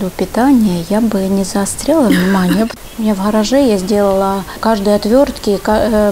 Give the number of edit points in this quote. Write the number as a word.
two